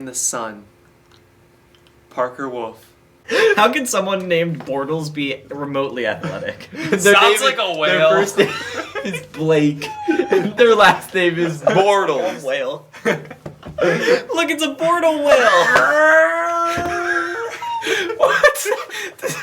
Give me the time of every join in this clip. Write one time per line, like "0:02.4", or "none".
0:03.1